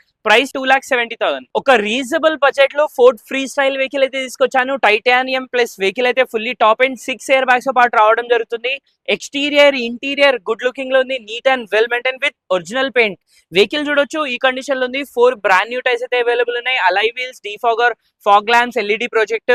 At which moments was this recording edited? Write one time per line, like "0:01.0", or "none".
none